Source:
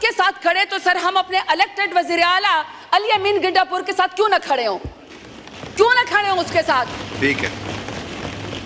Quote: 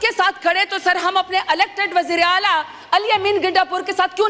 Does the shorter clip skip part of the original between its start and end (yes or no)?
no